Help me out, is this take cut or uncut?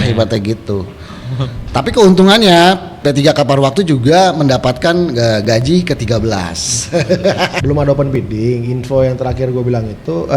cut